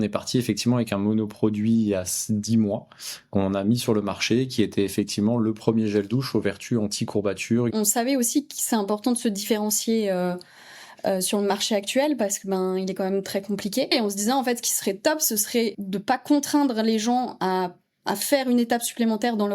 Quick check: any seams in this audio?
yes; 3 cuts; at 7.7 s, 13.9 s, 15.8 s

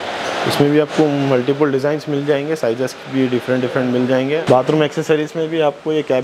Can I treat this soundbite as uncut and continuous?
no; 1 cut; at 4.4 s

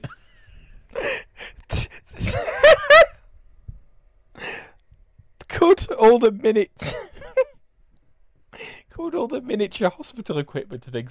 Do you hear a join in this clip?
no; 0 cuts

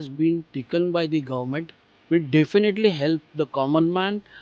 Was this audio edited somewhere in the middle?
no; 0 cuts

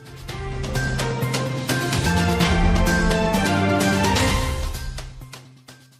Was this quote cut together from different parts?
yes; 1 cut; at 1.0 s

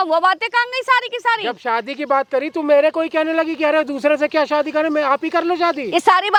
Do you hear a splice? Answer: no; 0 cuts

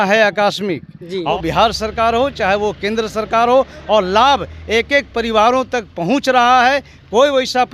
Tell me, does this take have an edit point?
yes; 1 cut; at 1.3 s

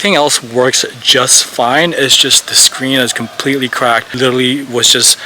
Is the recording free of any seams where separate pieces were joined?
no; 1 cut; at 4.1 s

